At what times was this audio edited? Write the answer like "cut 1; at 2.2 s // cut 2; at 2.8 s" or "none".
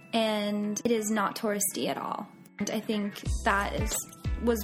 cut 1; at 0.8 s // cut 2; at 2.6 s